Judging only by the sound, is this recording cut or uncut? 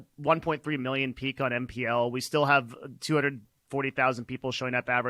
uncut